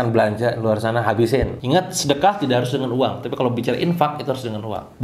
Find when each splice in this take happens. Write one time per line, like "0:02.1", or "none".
0:01.6